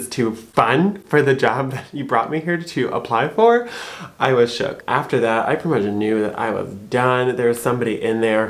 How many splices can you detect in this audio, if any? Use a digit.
0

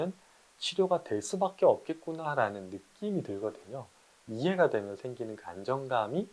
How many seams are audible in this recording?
1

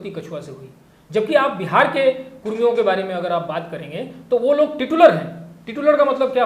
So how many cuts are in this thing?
0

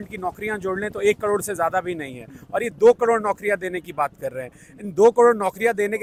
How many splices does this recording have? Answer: 0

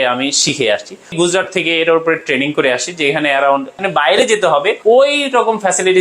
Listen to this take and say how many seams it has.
3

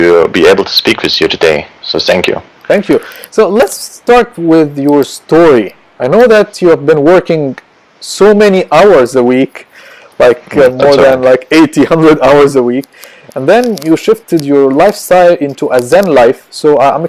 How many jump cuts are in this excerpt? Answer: 1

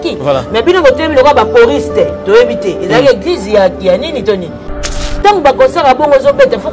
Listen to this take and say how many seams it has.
1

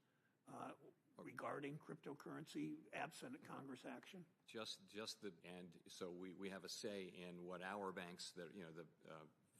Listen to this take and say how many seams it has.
1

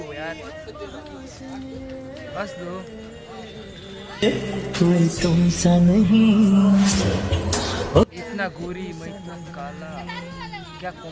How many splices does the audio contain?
0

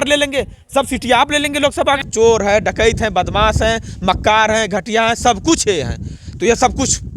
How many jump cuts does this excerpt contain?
1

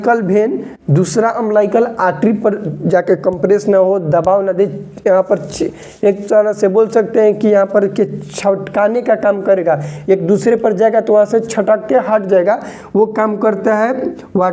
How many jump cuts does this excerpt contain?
0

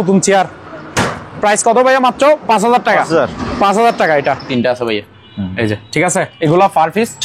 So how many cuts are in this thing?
1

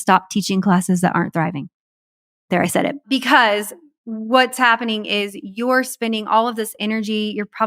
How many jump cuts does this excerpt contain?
1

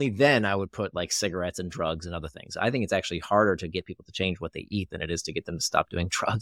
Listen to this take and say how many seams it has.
0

